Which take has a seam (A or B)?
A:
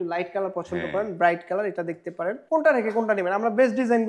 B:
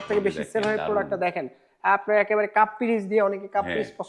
A